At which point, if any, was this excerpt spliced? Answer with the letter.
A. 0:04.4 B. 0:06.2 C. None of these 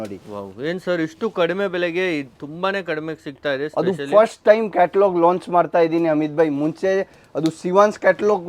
C